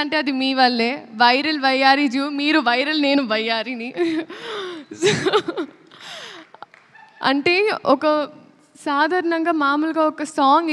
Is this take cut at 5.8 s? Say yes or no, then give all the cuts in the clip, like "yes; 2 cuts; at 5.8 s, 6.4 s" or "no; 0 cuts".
no; 0 cuts